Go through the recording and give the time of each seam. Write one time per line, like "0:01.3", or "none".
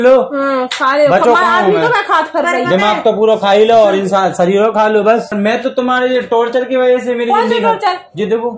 0:05.3